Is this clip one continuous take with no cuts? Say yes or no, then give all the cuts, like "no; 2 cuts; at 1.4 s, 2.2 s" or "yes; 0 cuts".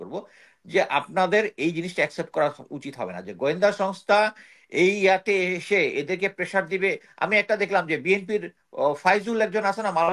yes; 0 cuts